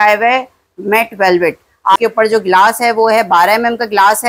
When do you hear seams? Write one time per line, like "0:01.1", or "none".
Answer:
0:02.0